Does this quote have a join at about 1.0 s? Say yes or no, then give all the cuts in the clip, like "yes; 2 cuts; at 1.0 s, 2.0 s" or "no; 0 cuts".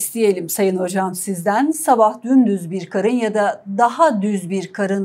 no; 0 cuts